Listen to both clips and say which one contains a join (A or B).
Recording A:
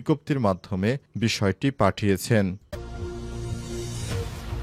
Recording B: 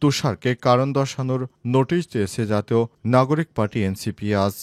A